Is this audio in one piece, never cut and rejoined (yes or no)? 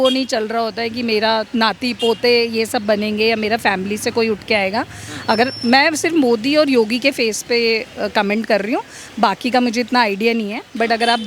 yes